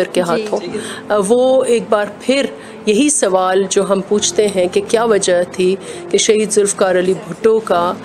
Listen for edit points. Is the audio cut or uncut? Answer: uncut